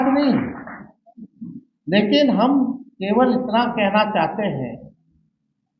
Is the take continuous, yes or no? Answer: yes